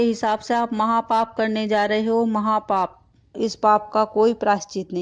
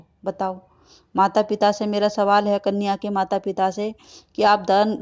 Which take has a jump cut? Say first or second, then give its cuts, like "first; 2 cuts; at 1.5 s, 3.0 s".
first; 1 cut; at 3.4 s